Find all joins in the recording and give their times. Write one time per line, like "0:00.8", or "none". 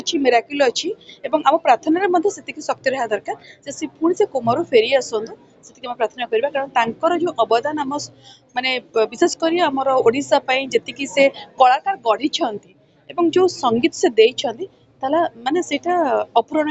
none